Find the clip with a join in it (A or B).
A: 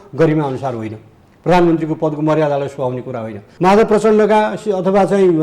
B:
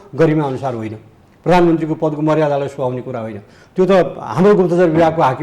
A